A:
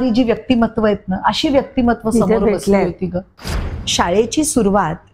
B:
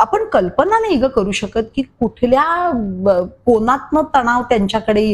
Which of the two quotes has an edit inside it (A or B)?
A